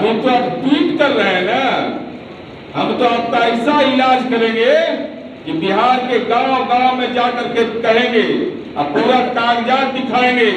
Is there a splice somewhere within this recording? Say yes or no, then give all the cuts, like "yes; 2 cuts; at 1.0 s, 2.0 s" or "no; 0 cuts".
no; 0 cuts